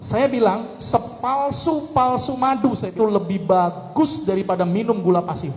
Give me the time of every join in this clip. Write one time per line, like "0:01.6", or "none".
0:02.9